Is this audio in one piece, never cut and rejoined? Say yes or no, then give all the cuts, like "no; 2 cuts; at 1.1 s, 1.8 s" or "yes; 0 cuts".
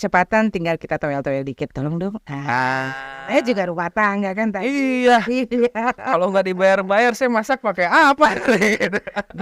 yes; 0 cuts